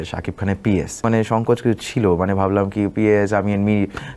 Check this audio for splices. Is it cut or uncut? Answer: cut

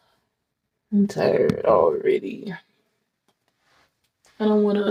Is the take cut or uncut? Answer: uncut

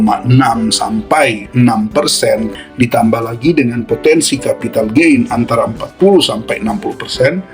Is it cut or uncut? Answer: cut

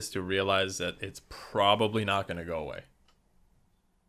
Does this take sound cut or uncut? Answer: uncut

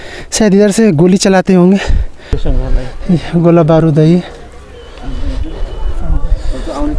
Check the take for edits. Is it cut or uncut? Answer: cut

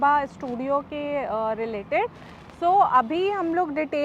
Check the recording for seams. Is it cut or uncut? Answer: uncut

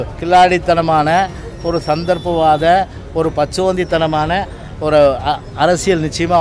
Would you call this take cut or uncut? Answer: uncut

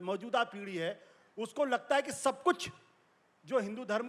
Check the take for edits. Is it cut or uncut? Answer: uncut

